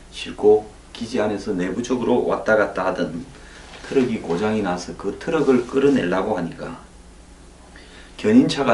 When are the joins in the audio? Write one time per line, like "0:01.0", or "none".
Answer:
none